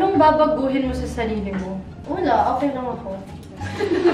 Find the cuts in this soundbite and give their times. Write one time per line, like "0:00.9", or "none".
0:01.9